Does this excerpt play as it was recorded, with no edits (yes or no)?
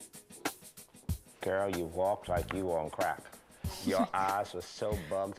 yes